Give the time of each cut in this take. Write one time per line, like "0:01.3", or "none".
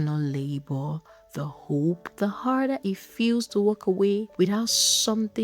0:02.1
0:04.3